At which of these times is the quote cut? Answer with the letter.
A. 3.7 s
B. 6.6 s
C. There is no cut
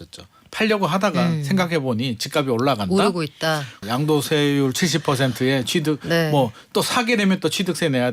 A